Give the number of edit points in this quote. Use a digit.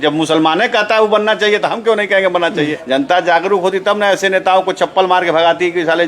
1